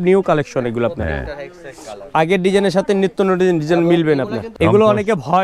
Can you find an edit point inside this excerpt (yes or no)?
yes